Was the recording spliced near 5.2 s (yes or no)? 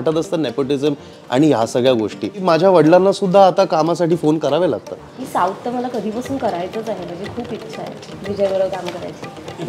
yes